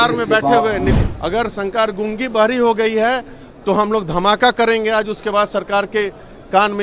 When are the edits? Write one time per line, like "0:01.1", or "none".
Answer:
0:00.9